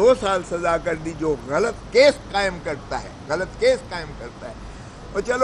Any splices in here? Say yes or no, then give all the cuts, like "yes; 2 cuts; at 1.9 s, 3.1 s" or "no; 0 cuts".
no; 0 cuts